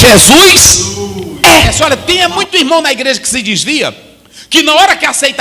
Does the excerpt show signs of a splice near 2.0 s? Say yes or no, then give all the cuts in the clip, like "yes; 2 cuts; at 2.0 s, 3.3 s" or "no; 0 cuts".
yes; 1 cut; at 2.0 s